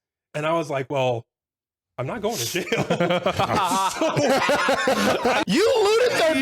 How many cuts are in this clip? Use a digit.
1